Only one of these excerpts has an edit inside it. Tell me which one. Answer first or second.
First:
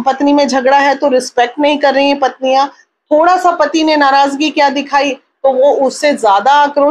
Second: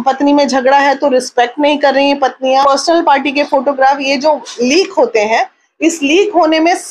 second